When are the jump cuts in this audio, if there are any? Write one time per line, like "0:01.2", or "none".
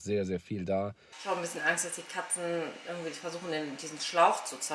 0:01.1